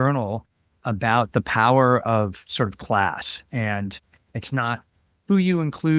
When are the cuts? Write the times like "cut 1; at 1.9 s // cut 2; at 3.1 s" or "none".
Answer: none